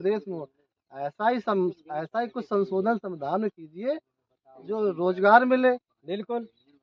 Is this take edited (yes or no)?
no